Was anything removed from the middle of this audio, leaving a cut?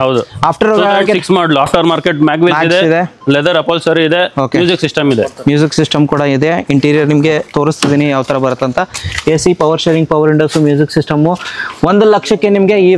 no; 0 cuts

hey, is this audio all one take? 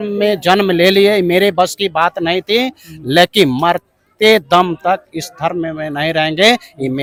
yes; 0 cuts

